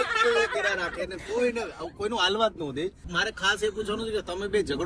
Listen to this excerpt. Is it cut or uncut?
cut